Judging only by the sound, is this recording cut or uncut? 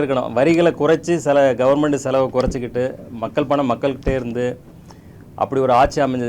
uncut